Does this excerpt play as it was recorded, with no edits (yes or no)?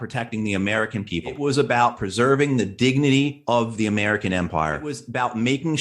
no